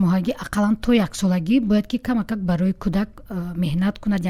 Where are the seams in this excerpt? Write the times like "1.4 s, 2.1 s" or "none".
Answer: none